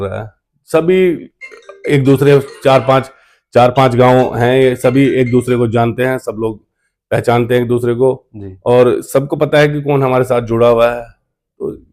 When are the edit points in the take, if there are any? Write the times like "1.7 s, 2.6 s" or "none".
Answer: none